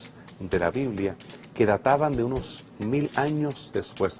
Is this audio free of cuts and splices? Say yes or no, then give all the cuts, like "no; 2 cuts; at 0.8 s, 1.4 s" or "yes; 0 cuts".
no; 1 cut; at 3.1 s